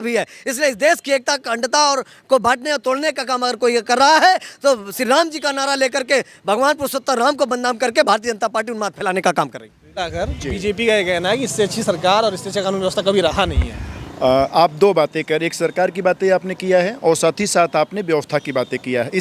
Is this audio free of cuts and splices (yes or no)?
yes